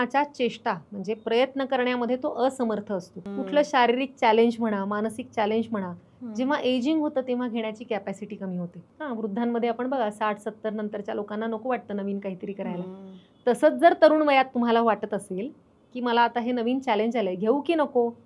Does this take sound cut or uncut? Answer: cut